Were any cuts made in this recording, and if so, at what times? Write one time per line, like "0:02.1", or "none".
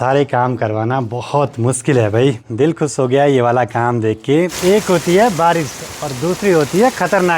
0:02.4
0:04.5